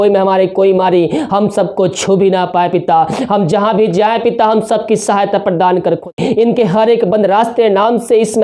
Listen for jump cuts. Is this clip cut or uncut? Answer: cut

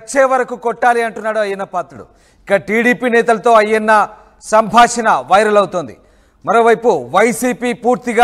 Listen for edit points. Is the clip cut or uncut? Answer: uncut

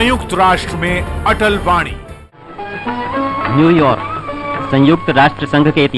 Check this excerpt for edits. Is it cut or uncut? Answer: cut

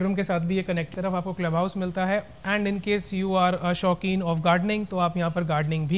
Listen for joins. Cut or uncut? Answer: cut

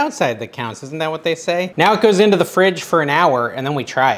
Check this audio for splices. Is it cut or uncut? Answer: uncut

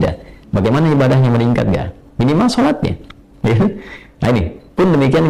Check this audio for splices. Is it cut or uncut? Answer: uncut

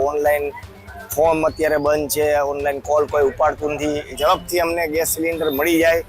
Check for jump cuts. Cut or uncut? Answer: cut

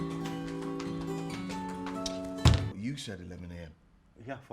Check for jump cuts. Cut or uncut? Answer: cut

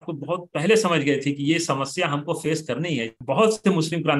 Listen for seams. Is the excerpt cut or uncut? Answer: cut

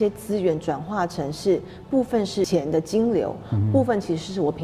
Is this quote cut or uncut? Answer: cut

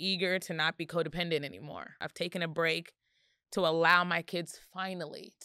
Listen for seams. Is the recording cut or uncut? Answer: cut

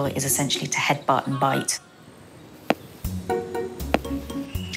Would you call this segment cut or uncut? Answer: uncut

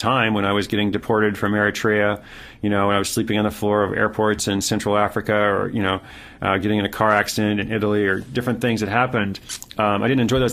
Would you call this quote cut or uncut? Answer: uncut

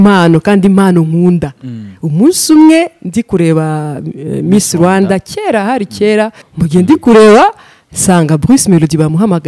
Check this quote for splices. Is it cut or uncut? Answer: cut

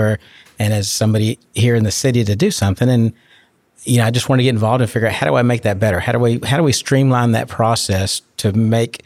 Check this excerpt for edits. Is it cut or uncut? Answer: uncut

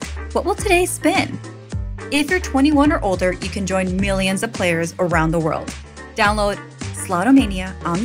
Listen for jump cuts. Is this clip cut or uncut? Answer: cut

